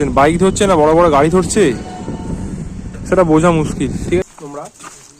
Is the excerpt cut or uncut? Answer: cut